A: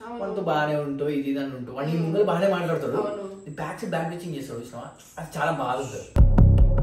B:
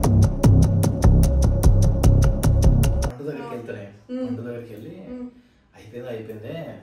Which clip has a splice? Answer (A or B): B